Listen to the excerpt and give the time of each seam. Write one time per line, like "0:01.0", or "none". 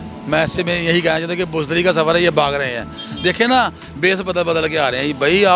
none